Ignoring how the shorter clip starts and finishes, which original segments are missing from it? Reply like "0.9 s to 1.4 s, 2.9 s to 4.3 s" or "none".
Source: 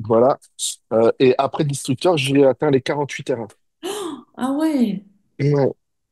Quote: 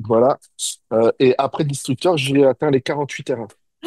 none